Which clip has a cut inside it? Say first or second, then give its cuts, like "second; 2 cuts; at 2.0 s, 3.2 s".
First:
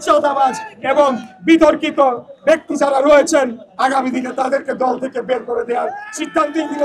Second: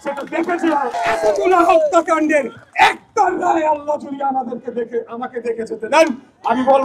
second; 1 cut; at 1.0 s